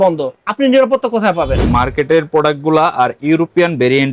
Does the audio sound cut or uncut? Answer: cut